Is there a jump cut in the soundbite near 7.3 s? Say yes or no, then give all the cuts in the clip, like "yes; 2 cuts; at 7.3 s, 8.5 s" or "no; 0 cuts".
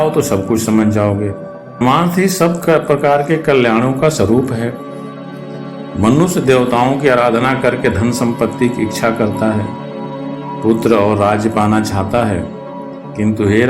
no; 1 cut; at 1.8 s